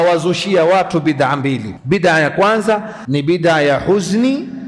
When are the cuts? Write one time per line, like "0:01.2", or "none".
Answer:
0:01.7
0:03.0